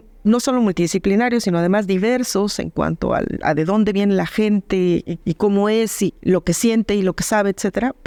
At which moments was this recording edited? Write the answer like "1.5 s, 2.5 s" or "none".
none